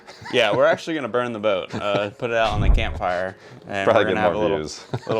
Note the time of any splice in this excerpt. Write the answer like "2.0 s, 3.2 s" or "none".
none